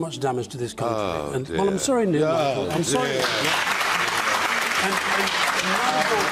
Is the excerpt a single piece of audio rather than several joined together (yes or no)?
no